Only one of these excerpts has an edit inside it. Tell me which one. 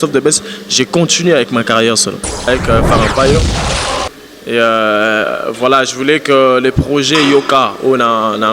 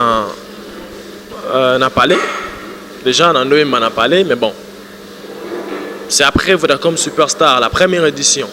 first; 1 cut; at 2.5 s

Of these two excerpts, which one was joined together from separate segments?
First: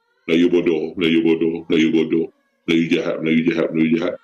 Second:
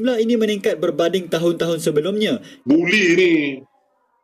second; 1 cut; at 2.5 s

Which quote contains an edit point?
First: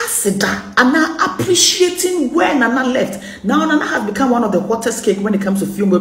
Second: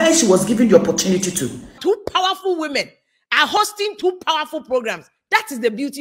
second; 1 cut; at 1.7 s

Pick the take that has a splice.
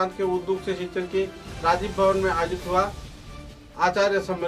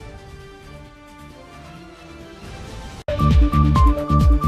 second; 1 cut; at 3.0 s

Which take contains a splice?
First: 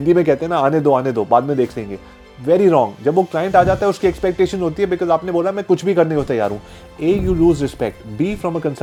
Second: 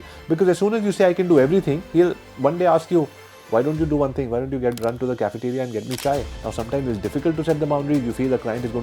second; 1 cut; at 6.3 s

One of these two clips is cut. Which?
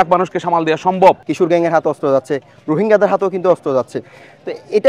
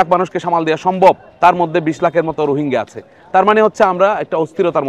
first; 1 cut; at 1.3 s

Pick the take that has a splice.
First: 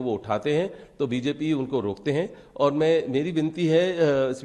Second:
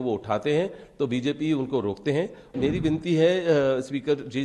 second; 1 cut; at 2.5 s

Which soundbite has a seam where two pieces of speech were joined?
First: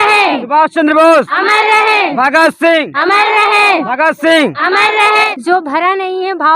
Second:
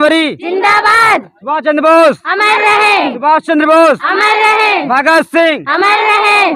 first; 1 cut; at 5.1 s

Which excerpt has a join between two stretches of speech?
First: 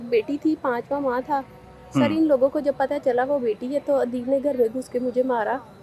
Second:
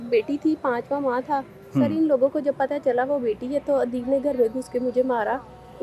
second; 1 cut; at 1.6 s

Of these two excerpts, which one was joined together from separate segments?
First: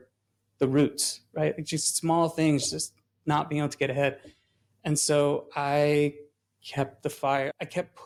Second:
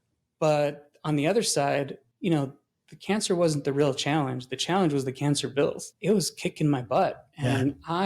second; 1 cut; at 5.9 s

